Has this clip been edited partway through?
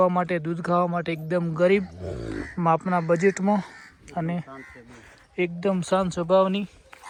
no; 0 cuts

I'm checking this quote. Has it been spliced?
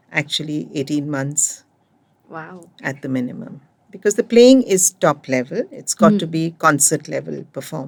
no; 0 cuts

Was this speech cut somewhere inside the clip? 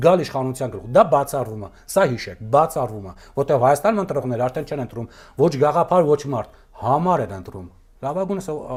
no; 0 cuts

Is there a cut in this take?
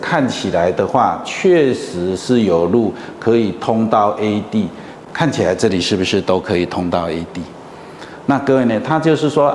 no; 0 cuts

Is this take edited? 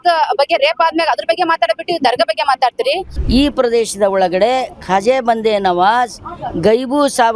yes; 1 cut; at 3.1 s

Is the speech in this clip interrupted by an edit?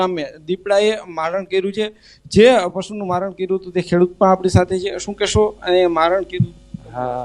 yes; 1 cut; at 6.3 s

